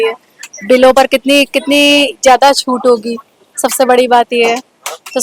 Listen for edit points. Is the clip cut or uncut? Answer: uncut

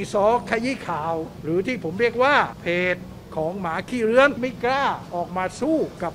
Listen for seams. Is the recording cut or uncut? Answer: cut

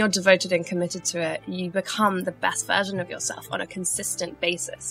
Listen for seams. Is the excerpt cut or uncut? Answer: uncut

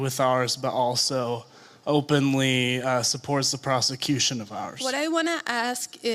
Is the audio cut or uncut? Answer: cut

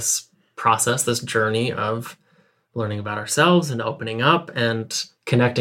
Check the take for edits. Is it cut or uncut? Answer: uncut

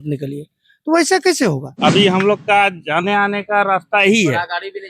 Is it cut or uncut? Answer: cut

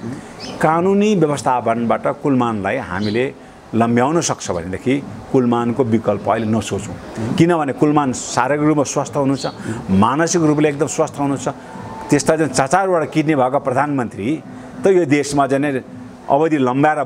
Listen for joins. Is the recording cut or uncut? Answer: uncut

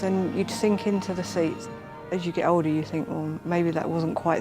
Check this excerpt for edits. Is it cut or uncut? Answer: cut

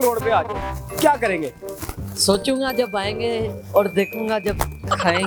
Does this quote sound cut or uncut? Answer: uncut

